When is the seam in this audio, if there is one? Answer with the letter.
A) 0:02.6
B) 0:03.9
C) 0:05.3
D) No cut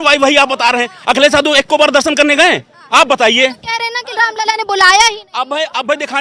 D